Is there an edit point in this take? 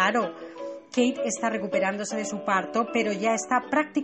yes; 1 cut; at 2.7 s

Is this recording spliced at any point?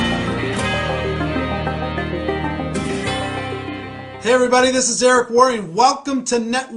no; 0 cuts

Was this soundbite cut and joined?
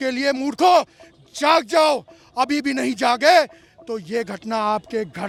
no; 0 cuts

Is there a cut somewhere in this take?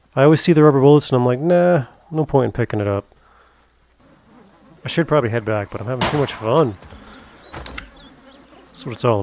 yes; 1 cut; at 4.0 s

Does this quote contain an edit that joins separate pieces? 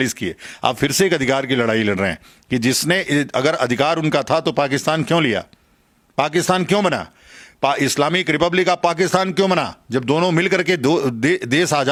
no; 0 cuts

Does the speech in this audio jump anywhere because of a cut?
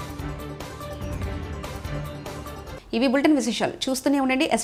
no; 0 cuts

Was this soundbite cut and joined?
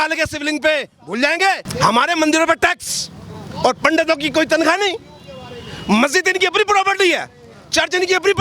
yes; 1 cut; at 1.7 s

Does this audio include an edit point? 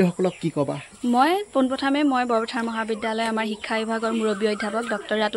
yes; 1 cut; at 0.9 s

